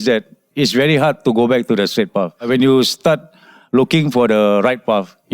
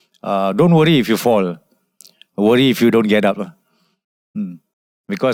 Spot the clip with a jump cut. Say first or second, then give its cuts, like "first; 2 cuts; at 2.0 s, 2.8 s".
first; 1 cut; at 2.5 s